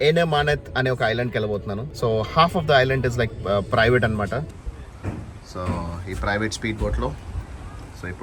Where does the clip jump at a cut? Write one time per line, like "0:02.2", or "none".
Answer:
0:01.8
0:04.6